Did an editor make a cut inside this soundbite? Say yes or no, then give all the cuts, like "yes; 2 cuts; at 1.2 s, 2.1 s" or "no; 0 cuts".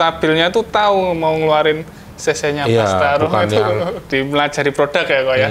yes; 1 cut; at 4.0 s